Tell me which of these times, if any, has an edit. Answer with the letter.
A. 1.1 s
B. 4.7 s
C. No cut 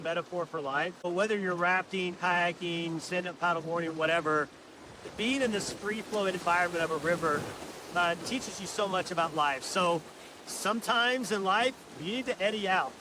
A